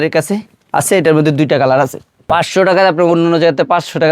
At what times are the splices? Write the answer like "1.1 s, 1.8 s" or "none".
2.3 s